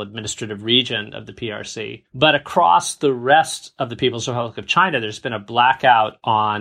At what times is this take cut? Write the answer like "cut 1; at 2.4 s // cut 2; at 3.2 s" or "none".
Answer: cut 1; at 2.0 s